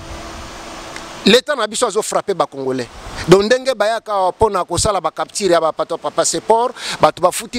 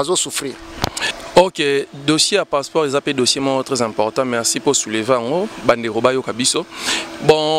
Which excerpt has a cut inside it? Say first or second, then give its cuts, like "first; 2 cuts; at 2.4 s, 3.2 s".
second; 1 cut; at 1.1 s